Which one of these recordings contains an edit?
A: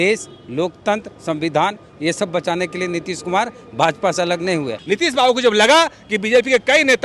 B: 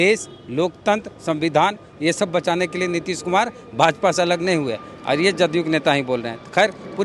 A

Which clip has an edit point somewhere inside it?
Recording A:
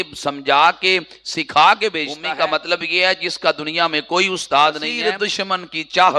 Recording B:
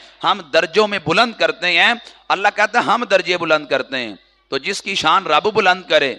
A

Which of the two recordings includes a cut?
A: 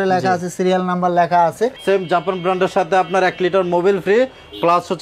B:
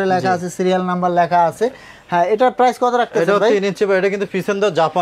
A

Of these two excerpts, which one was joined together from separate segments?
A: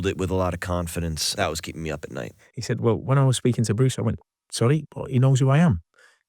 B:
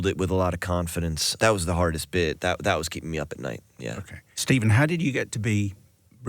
A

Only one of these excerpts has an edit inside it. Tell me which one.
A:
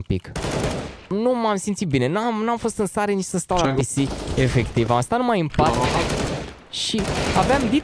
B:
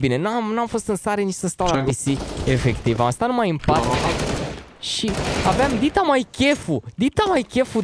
A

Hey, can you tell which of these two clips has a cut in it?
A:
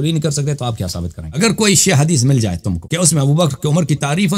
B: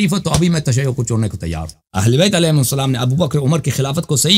A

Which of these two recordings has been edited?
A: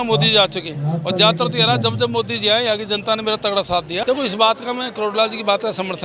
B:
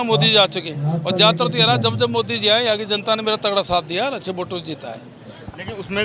A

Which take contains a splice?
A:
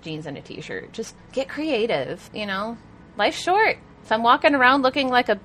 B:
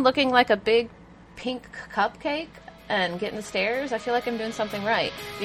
A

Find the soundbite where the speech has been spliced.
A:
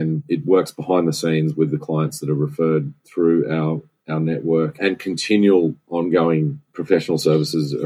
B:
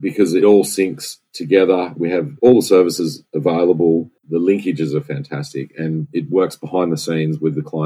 B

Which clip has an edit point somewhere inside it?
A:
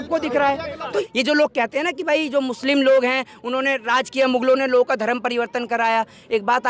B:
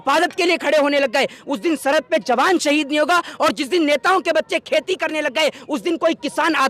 A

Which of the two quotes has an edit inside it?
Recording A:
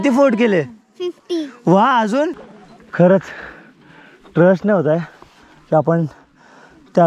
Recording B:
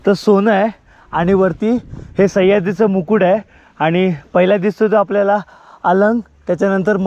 A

